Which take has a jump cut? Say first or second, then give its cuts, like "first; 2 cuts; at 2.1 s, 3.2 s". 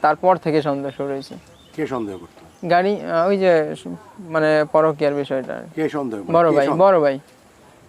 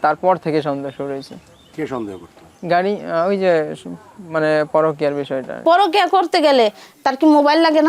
second; 1 cut; at 5.5 s